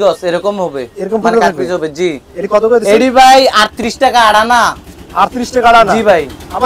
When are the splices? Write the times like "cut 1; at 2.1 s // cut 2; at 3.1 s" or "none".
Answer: none